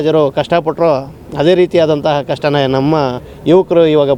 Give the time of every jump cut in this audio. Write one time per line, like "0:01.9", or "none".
none